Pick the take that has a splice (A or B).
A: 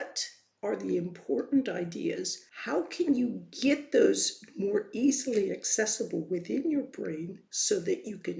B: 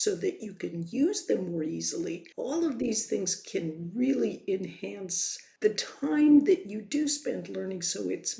B